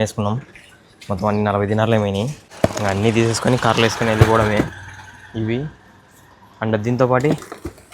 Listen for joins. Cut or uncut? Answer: cut